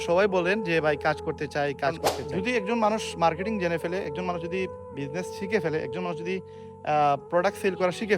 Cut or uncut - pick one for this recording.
cut